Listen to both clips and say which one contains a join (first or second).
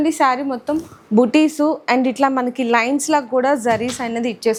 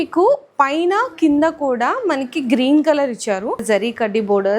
second